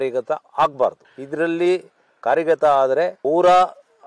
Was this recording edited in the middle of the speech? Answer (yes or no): no